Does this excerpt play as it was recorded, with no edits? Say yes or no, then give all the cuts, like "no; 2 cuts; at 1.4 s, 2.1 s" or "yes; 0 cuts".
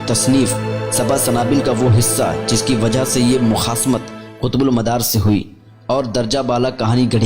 yes; 0 cuts